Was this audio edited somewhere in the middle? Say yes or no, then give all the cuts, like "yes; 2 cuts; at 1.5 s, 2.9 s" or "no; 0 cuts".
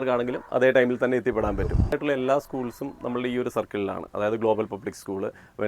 yes; 1 cut; at 1.9 s